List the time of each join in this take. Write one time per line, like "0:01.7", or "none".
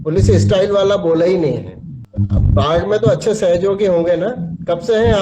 none